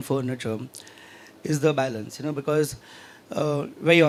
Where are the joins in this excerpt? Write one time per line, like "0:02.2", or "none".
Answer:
none